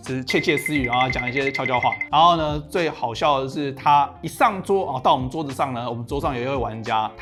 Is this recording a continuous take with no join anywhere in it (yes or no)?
yes